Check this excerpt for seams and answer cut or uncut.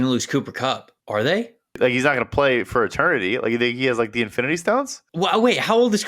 cut